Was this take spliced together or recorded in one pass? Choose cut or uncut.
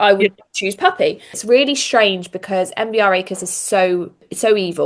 cut